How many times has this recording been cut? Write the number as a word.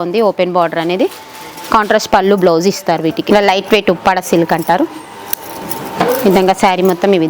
one